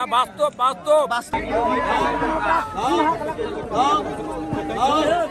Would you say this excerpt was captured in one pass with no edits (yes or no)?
yes